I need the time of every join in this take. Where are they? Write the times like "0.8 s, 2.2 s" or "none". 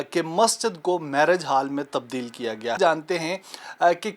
2.8 s